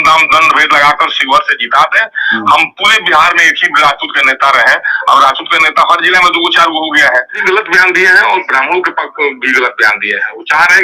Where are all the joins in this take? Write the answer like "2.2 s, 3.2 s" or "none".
7.4 s